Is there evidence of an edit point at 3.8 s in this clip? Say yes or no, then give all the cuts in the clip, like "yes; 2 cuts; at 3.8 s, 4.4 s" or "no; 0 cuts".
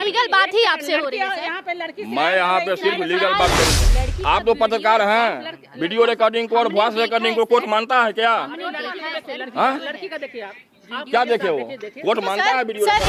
yes; 1 cut; at 3.8 s